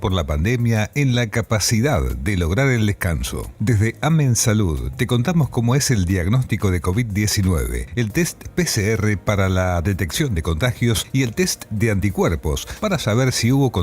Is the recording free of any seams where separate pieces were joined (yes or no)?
no